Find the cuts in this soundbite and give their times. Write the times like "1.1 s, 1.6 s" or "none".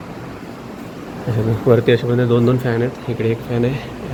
none

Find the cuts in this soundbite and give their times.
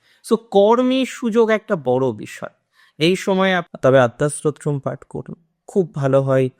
3.7 s

